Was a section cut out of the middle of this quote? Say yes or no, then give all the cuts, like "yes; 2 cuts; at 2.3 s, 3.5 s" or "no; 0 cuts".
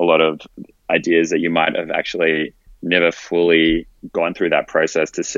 yes; 1 cut; at 4.0 s